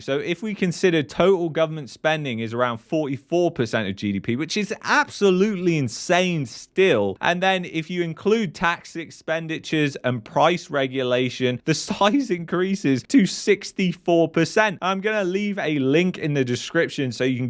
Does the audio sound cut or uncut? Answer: uncut